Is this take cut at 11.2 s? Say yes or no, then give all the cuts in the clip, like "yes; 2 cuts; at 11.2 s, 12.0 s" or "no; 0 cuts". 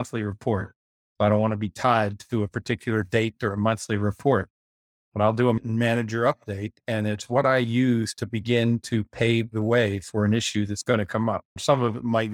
no; 1 cut; at 5.6 s